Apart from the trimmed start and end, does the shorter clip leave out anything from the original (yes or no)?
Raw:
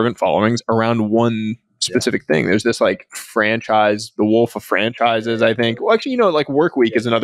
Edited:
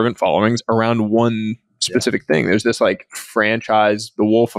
no